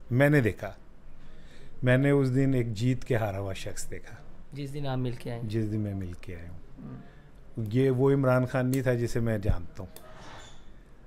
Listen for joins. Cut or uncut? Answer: uncut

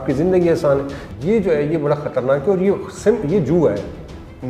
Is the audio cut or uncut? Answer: cut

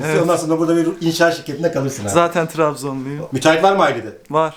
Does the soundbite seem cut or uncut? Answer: uncut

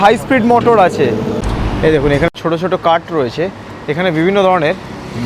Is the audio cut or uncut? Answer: cut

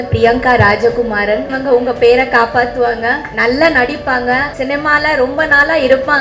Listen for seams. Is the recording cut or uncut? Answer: cut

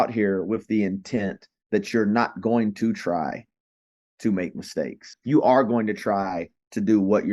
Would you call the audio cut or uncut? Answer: cut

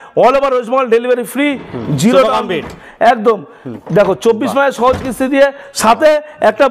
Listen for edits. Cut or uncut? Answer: uncut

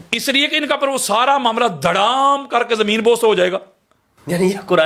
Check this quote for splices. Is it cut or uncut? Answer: uncut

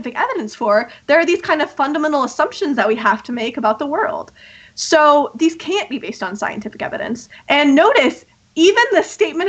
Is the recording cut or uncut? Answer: uncut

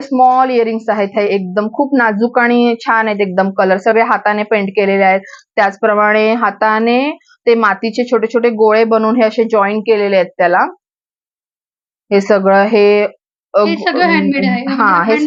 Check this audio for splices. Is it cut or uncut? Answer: uncut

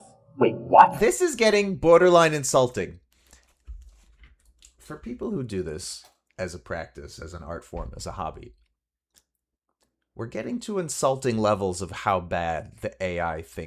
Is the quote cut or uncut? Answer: uncut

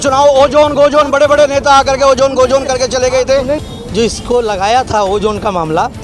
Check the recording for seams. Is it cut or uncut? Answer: cut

